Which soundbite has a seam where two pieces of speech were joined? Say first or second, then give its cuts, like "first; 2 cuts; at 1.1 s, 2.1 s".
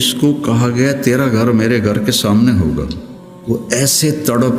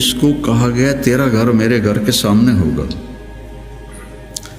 first; 1 cut; at 3.3 s